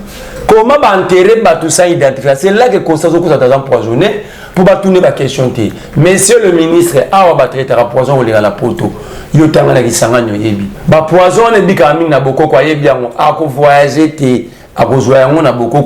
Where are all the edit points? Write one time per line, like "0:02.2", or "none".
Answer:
0:10.7